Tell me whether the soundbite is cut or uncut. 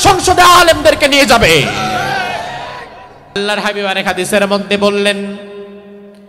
cut